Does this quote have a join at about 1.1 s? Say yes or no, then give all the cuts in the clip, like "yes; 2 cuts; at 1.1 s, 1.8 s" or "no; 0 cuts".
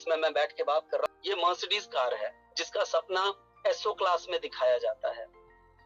yes; 1 cut; at 1.1 s